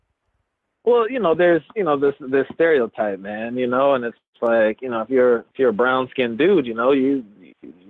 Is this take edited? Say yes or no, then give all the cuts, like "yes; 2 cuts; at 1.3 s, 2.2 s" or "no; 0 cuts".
no; 0 cuts